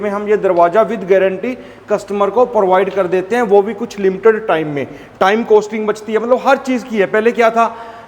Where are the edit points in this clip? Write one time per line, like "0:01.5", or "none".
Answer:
none